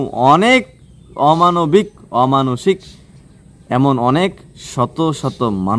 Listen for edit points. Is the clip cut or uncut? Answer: cut